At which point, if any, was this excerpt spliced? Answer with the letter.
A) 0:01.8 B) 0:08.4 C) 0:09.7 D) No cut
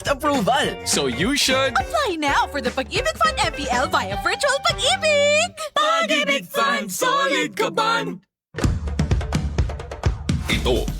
B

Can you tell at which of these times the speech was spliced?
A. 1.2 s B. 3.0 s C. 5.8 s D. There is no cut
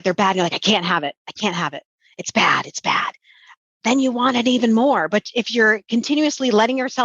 D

